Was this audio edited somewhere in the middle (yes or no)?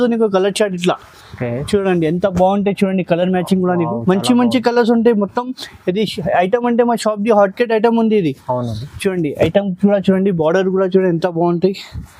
no